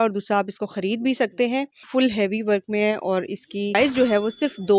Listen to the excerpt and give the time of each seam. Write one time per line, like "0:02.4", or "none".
0:01.8
0:03.7